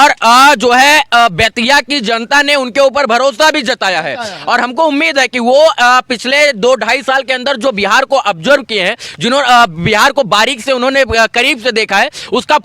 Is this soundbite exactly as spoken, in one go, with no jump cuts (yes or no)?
yes